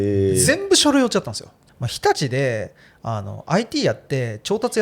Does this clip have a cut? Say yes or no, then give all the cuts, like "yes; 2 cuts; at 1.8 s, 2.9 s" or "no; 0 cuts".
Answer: yes; 1 cut; at 1.5 s